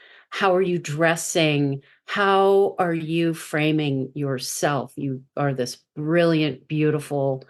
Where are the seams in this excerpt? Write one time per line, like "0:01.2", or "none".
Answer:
none